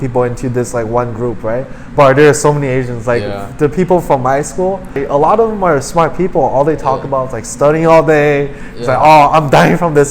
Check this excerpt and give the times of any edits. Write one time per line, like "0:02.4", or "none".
0:05.0